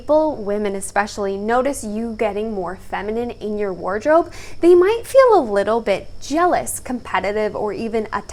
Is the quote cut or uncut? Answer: uncut